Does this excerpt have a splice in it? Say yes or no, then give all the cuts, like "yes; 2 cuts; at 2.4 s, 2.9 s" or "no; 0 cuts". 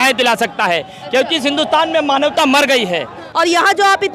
yes; 1 cut; at 3.2 s